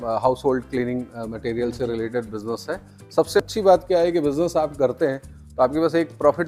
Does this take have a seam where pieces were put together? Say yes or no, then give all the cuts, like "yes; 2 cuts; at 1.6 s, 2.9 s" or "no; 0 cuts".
yes; 1 cut; at 3.4 s